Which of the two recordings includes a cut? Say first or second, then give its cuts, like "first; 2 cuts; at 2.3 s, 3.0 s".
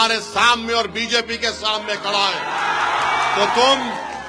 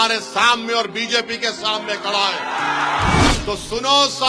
second; 1 cut; at 3.3 s